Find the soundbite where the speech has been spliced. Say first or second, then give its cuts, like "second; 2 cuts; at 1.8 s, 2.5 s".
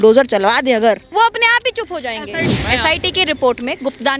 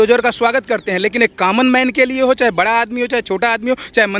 first; 2 cuts; at 1.0 s, 2.5 s